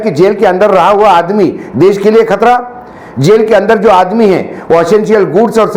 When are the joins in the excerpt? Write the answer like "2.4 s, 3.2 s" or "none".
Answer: none